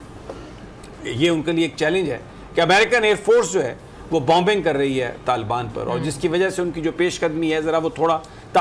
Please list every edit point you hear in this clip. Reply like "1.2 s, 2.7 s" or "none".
none

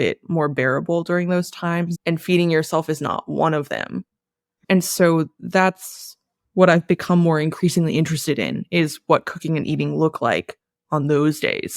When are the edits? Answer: none

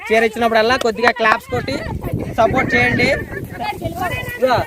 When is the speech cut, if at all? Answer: 3.4 s

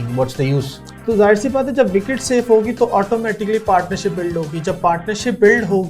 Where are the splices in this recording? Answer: 0.9 s

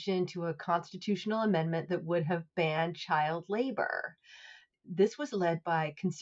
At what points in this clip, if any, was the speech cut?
4.7 s

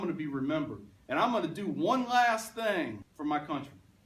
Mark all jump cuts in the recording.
3.1 s

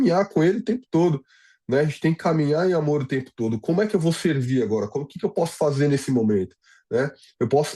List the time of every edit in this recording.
none

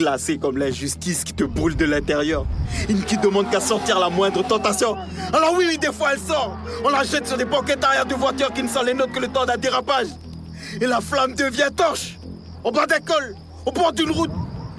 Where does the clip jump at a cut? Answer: none

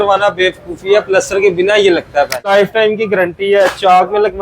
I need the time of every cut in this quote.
2.5 s

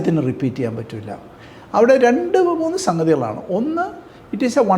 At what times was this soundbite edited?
none

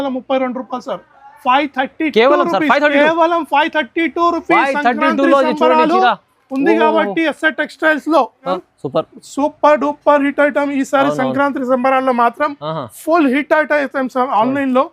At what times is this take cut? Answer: 8.6 s

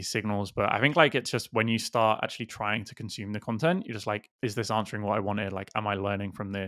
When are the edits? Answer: none

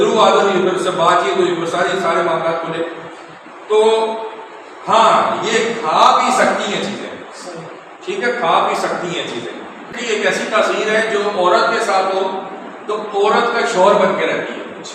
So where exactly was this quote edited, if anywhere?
9.9 s

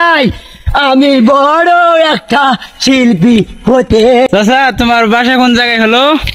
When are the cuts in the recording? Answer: 4.3 s

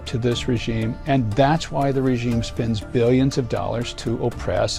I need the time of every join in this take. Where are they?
none

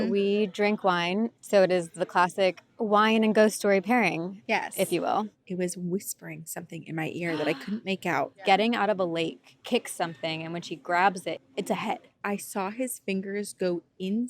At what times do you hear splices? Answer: 1.3 s, 5.4 s, 8.4 s, 9.5 s, 11.6 s

